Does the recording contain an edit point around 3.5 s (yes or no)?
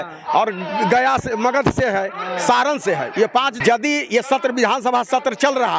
yes